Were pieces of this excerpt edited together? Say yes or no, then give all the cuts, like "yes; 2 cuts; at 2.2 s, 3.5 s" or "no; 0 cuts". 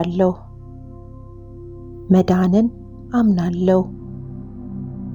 yes; 1 cut; at 3.8 s